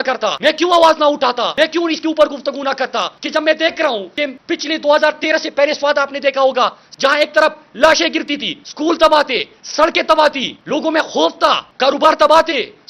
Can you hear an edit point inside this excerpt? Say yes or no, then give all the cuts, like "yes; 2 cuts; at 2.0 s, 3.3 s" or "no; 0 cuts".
yes; 1 cut; at 6.8 s